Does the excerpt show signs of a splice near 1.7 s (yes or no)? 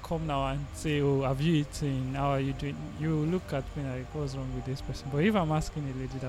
no